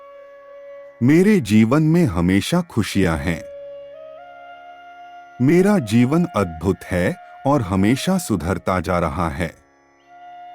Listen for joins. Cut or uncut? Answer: cut